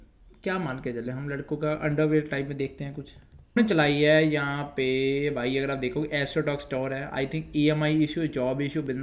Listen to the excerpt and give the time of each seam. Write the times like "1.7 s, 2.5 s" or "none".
3.6 s